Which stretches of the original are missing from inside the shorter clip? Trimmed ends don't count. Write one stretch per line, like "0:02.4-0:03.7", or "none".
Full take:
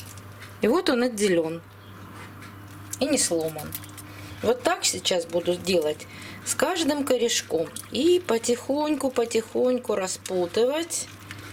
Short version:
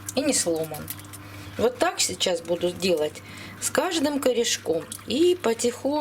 none